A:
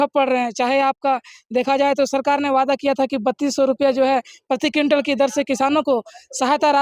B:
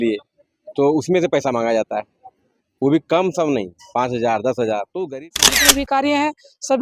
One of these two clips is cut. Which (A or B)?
B